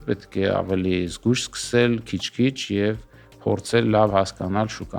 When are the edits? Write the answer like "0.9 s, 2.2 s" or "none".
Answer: none